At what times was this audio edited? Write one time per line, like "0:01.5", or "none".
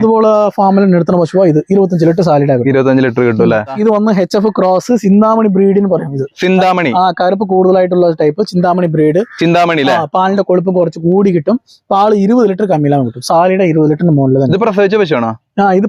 0:03.6